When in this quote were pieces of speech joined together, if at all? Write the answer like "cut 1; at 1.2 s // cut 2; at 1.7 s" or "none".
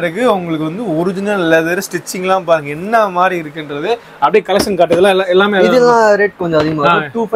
none